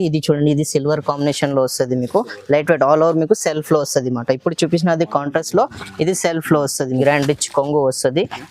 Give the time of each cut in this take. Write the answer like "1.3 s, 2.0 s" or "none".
7.0 s